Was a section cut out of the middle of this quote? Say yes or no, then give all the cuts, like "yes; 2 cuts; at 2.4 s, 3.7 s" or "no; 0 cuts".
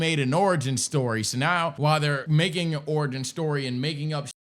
yes; 1 cut; at 2.0 s